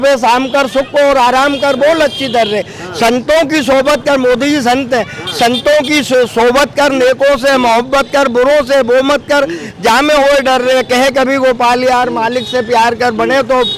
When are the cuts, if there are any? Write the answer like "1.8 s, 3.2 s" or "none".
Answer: none